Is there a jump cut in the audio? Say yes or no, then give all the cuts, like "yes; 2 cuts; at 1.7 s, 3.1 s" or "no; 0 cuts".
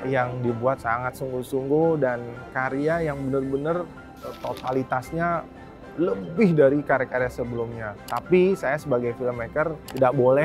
no; 0 cuts